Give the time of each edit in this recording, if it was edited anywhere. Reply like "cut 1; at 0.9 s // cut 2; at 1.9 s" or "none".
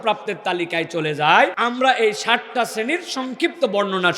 cut 1; at 1.6 s